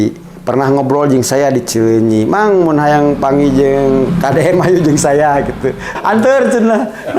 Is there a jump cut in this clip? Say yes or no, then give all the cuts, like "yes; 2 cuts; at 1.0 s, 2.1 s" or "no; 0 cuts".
yes; 1 cut; at 5.9 s